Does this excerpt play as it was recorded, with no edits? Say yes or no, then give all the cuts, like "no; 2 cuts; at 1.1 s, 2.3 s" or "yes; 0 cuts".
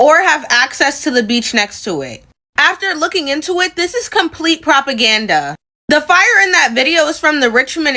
yes; 0 cuts